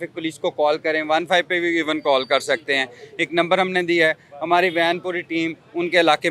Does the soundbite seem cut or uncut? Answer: uncut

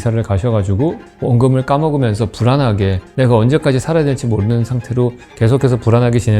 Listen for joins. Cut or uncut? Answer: uncut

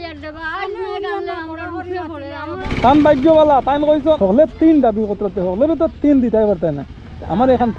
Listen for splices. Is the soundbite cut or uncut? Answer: cut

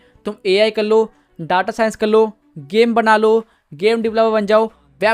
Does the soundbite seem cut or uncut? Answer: uncut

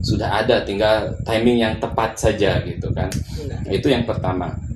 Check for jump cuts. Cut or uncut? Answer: uncut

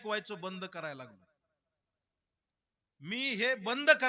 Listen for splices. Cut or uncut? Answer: uncut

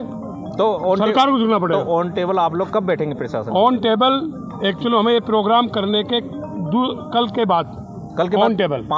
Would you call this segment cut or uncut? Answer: uncut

